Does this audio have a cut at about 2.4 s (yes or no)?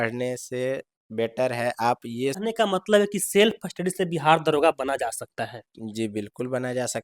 yes